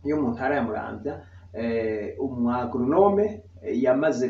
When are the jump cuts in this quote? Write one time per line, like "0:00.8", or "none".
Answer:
none

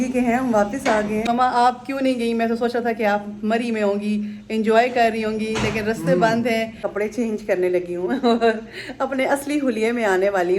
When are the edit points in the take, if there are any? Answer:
0:01.3
0:06.8

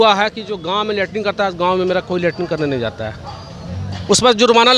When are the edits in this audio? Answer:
none

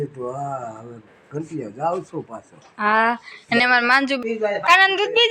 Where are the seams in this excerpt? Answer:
0:04.2

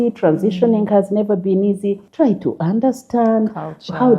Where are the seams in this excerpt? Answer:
0:02.0

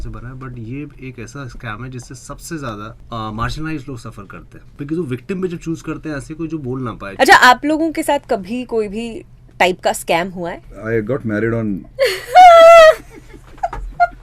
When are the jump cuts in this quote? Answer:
0:03.0
0:04.7
0:07.0
0:10.6

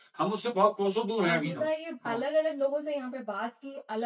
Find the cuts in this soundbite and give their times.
0:01.5

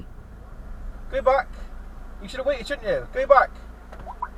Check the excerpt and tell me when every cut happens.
none

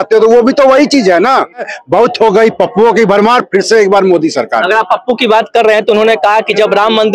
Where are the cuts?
0:01.8

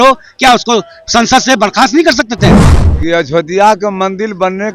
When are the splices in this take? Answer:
0:02.7

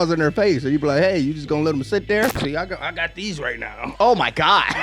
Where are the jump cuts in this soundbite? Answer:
0:02.4

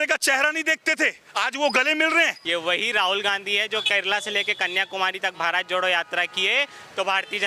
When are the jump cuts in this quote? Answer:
0:02.4

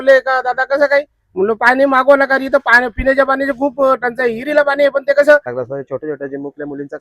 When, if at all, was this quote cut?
0:05.5

